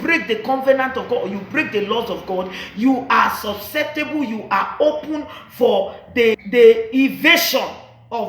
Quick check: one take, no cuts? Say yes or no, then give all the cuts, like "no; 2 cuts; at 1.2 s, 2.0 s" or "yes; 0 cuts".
no; 1 cut; at 6.4 s